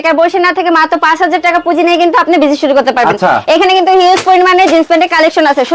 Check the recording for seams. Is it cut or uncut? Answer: uncut